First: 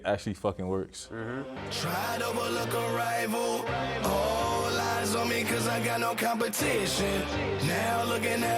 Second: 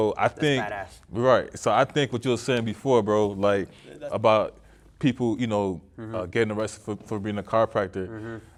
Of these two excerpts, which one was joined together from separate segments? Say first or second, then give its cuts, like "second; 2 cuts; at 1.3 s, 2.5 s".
first; 1 cut; at 1.5 s